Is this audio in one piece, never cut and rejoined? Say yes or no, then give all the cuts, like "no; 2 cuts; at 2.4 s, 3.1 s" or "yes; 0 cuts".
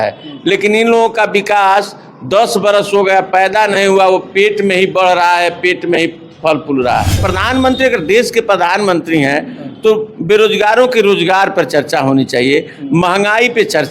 no; 1 cut; at 7.2 s